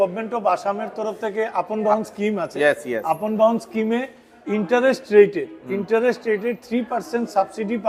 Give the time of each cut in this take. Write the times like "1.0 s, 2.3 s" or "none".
none